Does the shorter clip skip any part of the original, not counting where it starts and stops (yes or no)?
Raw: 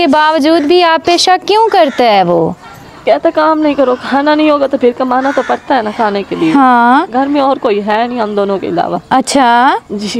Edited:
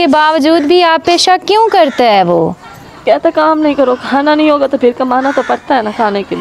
no